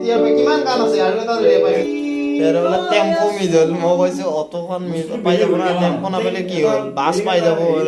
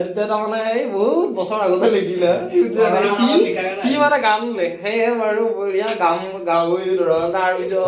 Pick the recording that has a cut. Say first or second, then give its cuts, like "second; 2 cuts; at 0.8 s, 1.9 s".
first; 1 cut; at 1.8 s